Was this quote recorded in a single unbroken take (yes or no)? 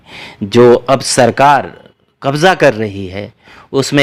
yes